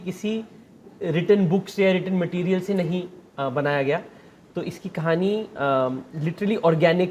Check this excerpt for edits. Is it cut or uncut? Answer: uncut